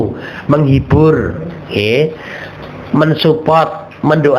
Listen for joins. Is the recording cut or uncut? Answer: uncut